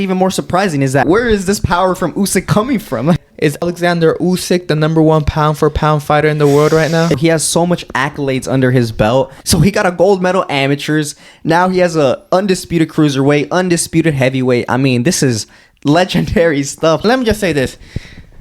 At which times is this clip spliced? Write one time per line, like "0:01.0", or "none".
0:01.0
0:03.2
0:07.2
0:09.4
0:17.0